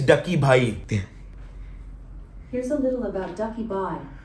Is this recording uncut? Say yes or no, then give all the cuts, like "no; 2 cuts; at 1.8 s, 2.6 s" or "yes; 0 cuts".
yes; 0 cuts